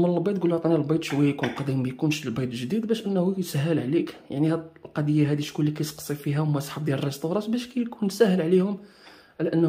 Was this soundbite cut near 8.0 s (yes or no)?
no